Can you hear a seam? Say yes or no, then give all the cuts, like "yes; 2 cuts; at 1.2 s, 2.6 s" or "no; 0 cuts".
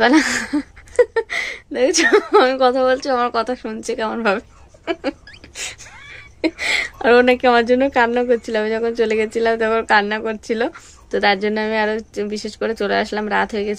no; 0 cuts